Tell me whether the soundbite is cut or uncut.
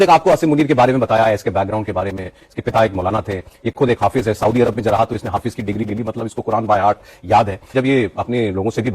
cut